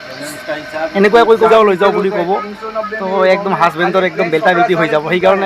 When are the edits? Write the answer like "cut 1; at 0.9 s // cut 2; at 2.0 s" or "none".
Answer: cut 1; at 1.5 s